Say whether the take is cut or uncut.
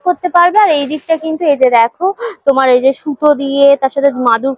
uncut